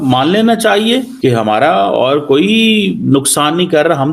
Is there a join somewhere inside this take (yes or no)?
yes